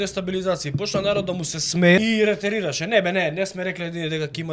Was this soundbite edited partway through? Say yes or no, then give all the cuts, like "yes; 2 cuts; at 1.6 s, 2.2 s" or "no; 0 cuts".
yes; 1 cut; at 2.0 s